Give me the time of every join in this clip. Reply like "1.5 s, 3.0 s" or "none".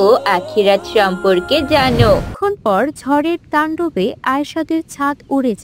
2.3 s